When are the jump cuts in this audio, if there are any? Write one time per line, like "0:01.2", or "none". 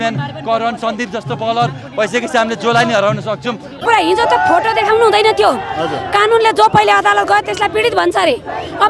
0:03.8